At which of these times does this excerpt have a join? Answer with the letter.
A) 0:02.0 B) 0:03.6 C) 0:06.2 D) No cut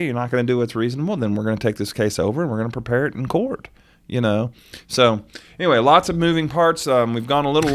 D